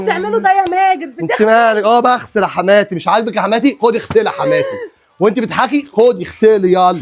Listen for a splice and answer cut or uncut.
uncut